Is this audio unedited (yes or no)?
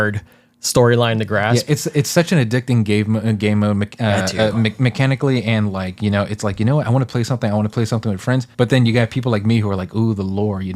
no